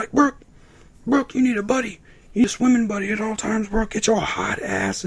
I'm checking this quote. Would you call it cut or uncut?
cut